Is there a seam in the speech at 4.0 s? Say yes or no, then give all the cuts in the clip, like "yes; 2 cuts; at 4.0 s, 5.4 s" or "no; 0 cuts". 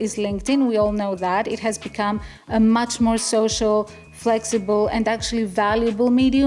no; 0 cuts